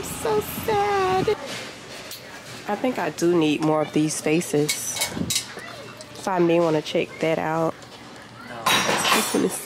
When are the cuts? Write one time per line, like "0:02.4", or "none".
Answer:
0:01.3
0:07.8

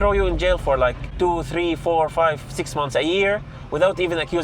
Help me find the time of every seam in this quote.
0:01.0

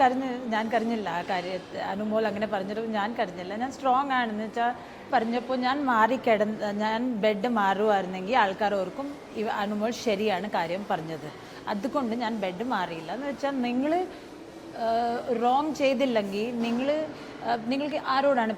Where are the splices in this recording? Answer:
0:05.1

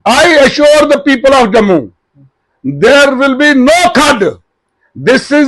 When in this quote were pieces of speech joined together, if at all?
none

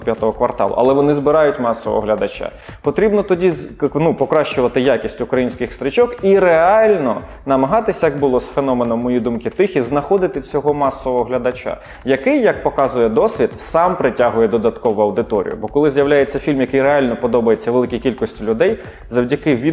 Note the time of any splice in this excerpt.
none

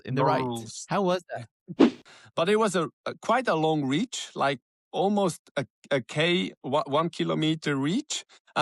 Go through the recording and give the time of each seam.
0:02.0

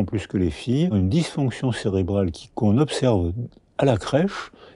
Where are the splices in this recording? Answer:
0:00.9

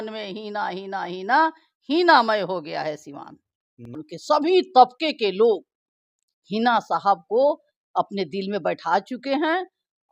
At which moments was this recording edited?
0:04.1

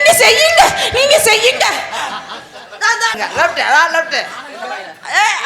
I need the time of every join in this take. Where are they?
0:03.2

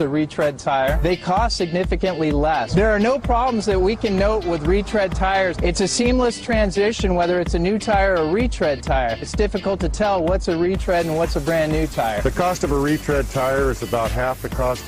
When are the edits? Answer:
none

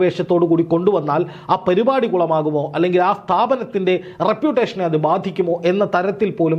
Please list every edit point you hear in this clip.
none

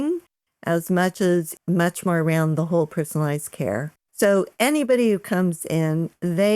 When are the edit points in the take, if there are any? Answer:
0:01.5
0:04.0

